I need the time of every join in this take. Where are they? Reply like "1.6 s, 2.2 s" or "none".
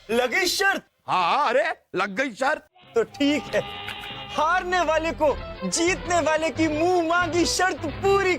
0.9 s